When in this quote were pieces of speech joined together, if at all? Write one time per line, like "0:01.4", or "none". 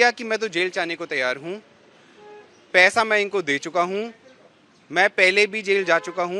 none